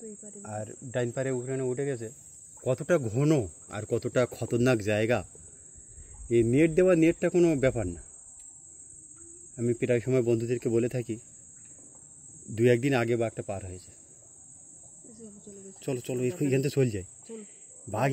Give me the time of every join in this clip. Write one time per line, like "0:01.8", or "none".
none